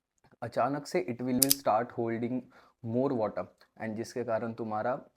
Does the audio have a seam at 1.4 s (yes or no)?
yes